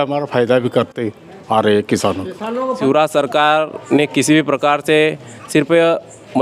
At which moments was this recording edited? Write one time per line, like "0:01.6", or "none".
0:02.8